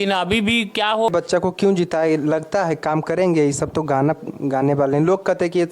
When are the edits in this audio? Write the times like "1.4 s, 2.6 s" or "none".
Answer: 1.1 s